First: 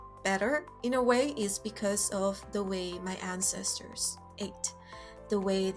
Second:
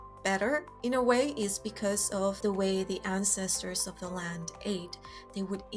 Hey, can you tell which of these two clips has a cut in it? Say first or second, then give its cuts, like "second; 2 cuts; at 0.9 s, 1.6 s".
second; 1 cut; at 2.4 s